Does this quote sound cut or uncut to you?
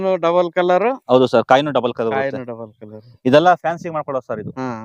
uncut